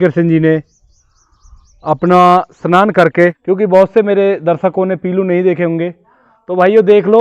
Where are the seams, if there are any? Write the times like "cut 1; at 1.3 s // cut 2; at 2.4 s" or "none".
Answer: cut 1; at 3.4 s